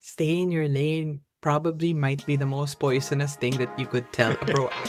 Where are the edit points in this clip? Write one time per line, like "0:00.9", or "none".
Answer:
none